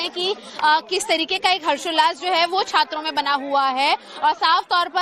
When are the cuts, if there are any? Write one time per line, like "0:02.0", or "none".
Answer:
0:01.0